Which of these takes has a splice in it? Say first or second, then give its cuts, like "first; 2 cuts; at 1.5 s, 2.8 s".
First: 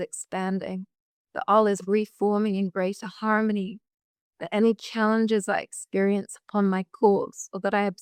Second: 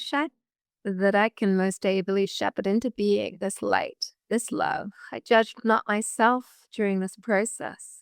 second; 1 cut; at 5.1 s